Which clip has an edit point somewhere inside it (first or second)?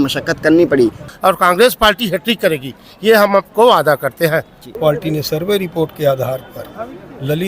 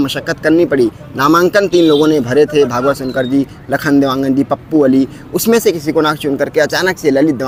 first